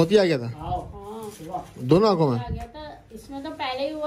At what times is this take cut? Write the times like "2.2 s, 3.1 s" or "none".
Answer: none